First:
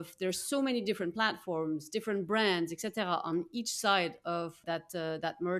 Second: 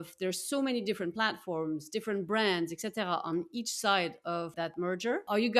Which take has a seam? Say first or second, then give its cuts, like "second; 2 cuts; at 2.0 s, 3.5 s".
second; 1 cut; at 4.7 s